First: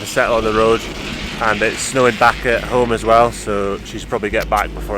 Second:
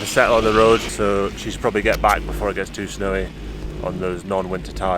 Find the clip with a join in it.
second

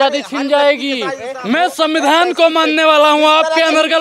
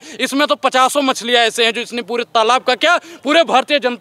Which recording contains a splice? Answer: first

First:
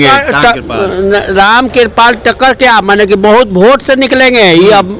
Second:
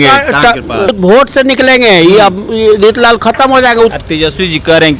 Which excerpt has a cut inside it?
second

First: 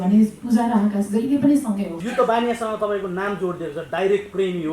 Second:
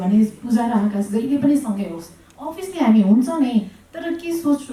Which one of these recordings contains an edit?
first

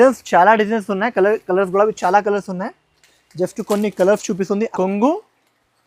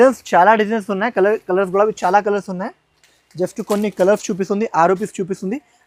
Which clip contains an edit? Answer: first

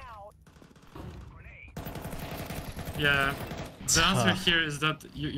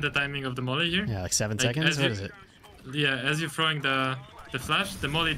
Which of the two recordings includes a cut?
first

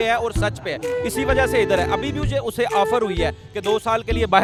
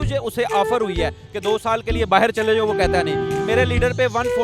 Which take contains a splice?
second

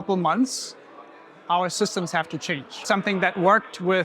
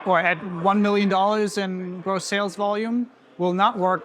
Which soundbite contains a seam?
first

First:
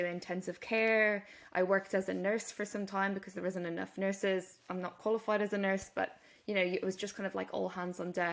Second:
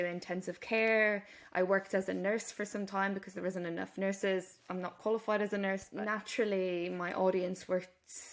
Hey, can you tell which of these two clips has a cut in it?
second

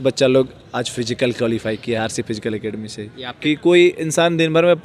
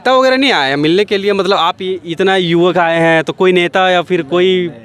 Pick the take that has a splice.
first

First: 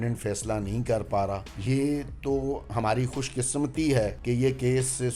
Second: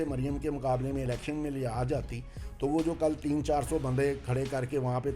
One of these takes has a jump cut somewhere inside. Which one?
first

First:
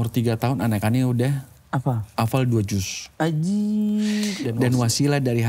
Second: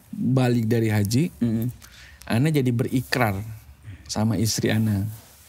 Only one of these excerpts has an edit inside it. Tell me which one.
first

